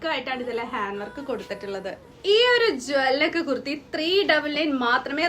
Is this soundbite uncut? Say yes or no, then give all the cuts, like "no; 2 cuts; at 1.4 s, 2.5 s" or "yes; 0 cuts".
no; 1 cut; at 2.1 s